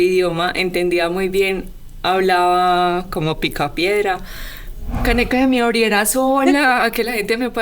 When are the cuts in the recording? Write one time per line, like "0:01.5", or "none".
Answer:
0:05.0

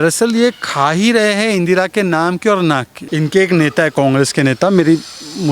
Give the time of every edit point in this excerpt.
0:03.0

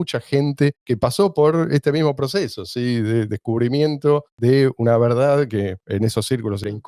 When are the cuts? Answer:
none

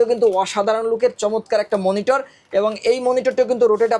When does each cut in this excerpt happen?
none

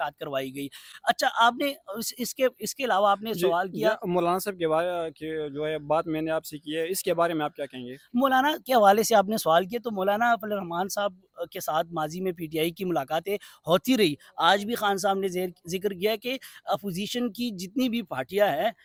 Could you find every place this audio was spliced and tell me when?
none

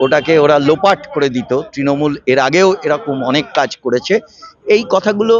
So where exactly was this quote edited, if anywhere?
none

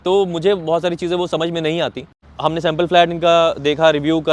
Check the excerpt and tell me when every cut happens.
0:02.3

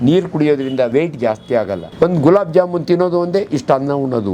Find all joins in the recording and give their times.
0:00.9
0:01.9

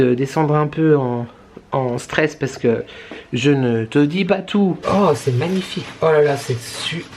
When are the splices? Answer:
0:04.8

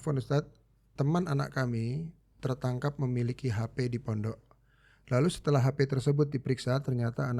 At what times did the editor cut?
none

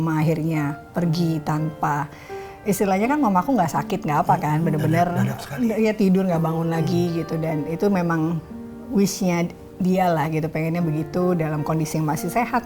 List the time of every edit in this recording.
none

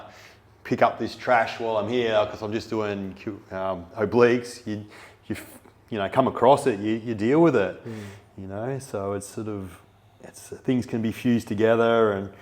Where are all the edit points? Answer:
none

